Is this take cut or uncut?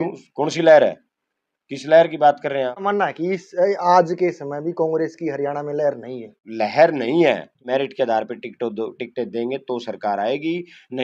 cut